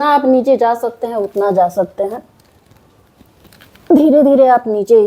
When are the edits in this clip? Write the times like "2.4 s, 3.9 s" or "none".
none